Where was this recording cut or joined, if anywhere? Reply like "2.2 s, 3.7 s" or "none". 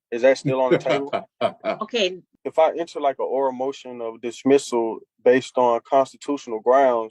2.3 s